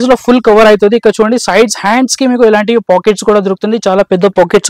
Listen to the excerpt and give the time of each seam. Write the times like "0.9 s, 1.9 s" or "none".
none